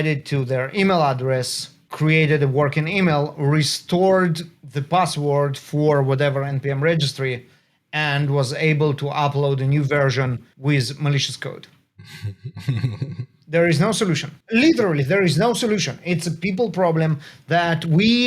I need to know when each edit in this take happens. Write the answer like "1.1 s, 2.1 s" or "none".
1.8 s, 10.5 s, 14.3 s